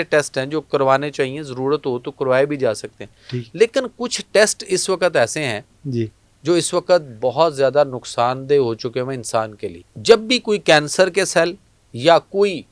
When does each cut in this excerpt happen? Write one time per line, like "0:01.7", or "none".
0:09.9